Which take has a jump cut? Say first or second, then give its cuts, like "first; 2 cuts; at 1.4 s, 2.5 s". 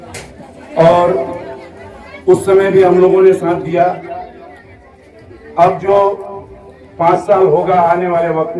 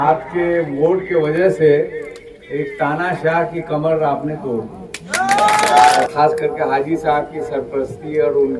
second; 1 cut; at 6.0 s